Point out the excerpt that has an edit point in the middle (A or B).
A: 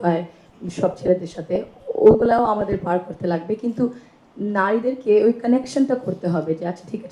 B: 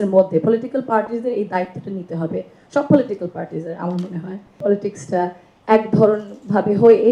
B